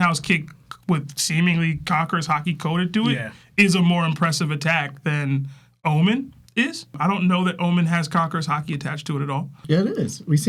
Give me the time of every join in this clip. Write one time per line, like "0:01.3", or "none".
none